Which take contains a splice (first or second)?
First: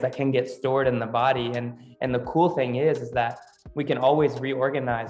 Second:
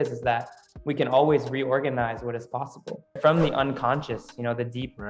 second